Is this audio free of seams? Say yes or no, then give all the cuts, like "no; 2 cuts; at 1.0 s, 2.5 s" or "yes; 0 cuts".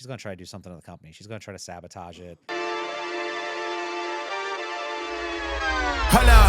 no; 1 cut; at 2.4 s